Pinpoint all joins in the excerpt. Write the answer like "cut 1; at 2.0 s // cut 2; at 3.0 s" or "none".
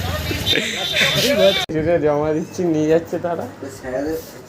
cut 1; at 1.7 s